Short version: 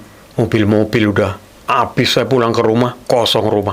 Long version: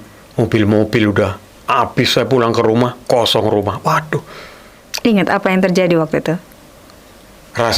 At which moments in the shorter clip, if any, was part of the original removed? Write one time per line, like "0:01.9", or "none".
none

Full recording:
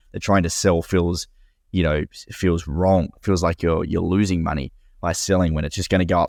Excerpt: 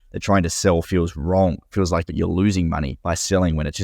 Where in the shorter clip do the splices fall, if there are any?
0:00.9
0:02.1
0:02.9

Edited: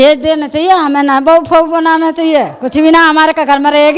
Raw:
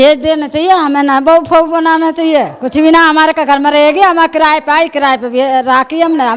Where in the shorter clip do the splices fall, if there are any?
none

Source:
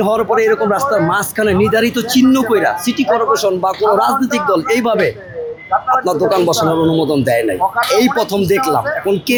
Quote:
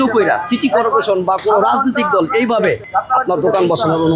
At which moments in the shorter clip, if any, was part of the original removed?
0:02.8

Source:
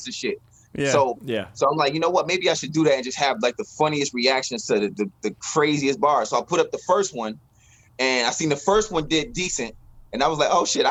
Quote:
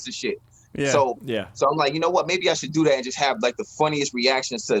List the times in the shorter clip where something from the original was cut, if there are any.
none

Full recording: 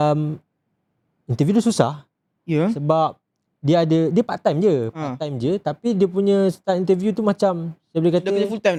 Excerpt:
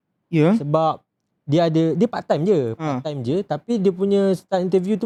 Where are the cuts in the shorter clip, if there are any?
none

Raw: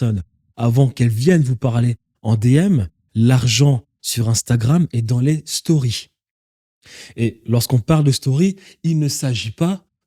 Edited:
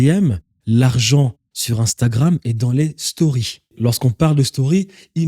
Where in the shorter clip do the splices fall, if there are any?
0:03.7

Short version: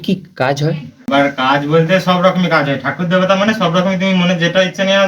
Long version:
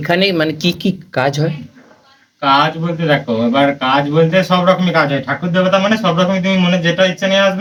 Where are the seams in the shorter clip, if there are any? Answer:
0:01.1

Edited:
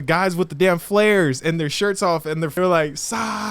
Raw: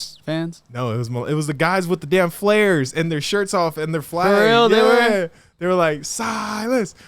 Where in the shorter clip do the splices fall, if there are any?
0:02.4

